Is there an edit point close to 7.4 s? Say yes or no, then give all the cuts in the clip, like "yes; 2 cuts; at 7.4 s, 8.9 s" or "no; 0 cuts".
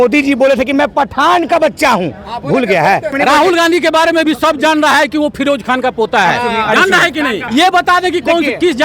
yes; 2 cuts; at 3.1 s, 7.4 s